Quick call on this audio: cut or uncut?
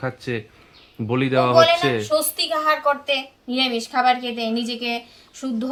uncut